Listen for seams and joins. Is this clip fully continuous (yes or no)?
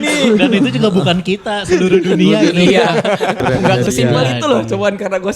no